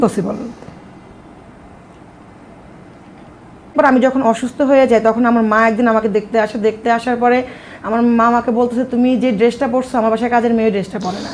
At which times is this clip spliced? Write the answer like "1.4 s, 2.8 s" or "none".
3.7 s